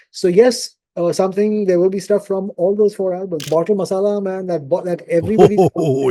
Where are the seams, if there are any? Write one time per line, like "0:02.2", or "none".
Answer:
0:03.5